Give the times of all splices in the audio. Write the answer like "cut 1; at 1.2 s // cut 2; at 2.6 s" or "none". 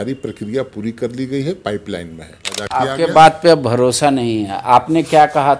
cut 1; at 2.5 s